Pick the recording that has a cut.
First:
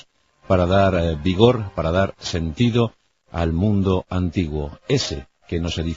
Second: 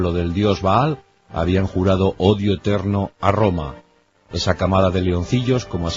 second; 1 cut; at 2.6 s

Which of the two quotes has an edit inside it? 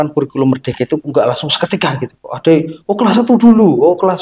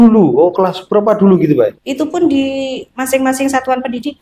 second; 1 cut; at 1.8 s

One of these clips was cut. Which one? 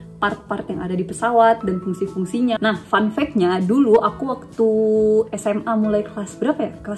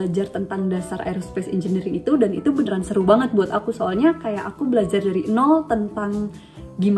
first; 1 cut; at 2.6 s

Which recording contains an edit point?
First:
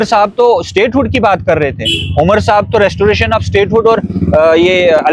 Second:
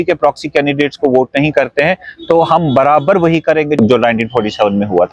second; 1 cut; at 3.8 s

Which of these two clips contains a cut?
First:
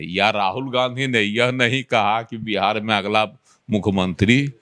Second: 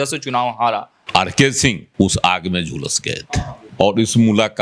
second; 3 cuts; at 0.9 s, 1.8 s, 3.6 s

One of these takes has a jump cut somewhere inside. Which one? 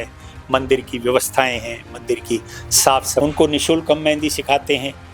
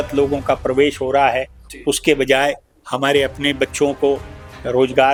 first; 1 cut; at 3.2 s

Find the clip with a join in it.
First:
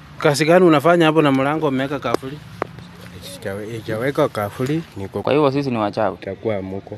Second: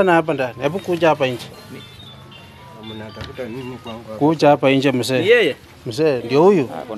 first; 1 cut; at 5.1 s

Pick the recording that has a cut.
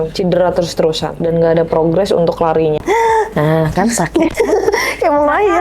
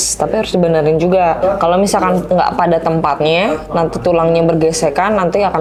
first; 1 cut; at 2.8 s

